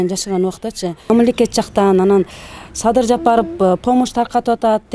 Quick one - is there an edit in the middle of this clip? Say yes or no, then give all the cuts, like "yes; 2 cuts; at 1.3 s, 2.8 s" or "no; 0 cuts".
yes; 1 cut; at 1.1 s